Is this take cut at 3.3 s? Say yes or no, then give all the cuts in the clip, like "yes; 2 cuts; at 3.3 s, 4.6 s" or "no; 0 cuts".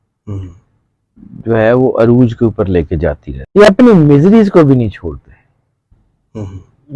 yes; 1 cut; at 3.3 s